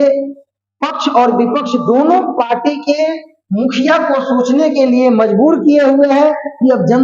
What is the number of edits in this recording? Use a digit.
0